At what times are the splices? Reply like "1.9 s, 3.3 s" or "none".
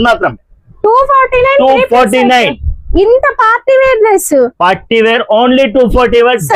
none